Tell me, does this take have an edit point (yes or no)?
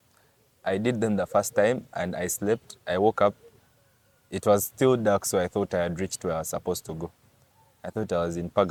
no